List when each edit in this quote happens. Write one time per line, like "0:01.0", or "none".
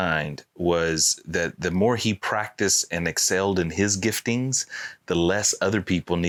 none